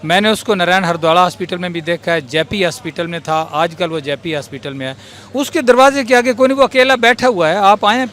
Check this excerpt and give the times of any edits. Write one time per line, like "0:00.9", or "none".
none